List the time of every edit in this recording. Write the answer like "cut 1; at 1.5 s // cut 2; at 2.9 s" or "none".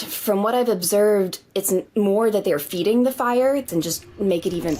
cut 1; at 3.7 s